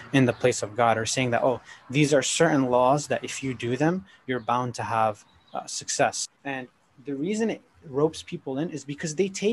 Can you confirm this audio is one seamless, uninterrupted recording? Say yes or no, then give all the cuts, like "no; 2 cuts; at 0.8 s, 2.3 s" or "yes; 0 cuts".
no; 1 cut; at 6.3 s